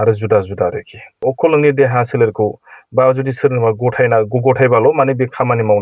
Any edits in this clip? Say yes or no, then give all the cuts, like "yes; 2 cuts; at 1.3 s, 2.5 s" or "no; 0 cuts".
yes; 1 cut; at 1.2 s